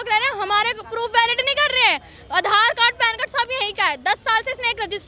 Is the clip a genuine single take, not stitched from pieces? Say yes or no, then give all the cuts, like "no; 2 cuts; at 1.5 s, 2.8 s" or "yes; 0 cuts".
yes; 0 cuts